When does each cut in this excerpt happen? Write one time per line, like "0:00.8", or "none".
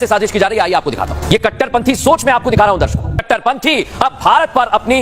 0:01.2
0:03.2